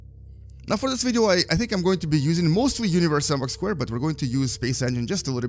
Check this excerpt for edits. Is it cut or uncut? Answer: uncut